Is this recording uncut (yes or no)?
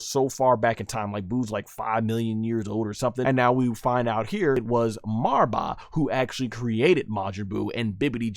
no